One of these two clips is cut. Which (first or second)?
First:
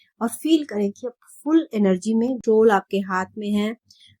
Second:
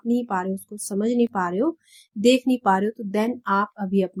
first